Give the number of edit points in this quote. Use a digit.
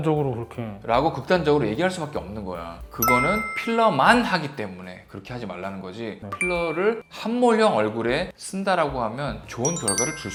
0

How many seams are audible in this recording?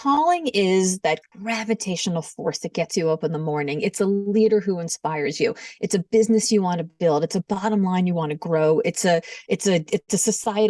1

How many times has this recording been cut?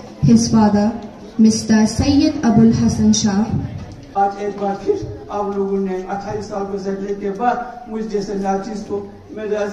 1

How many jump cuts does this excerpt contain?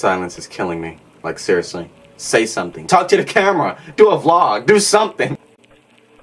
2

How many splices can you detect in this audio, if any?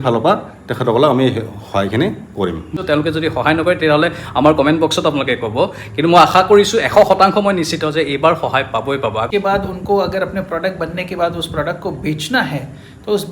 2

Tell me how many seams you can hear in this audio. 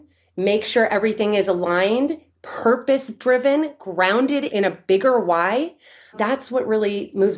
1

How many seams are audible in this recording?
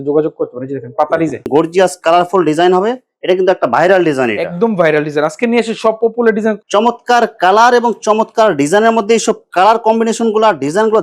2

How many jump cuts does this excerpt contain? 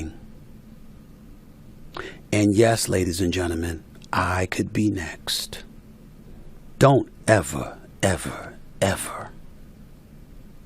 1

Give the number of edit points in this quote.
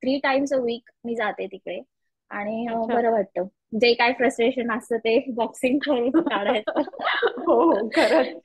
0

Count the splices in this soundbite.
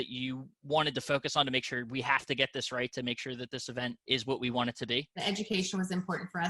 2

